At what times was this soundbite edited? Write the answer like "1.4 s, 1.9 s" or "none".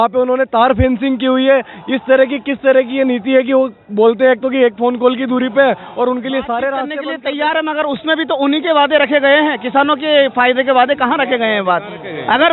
7.0 s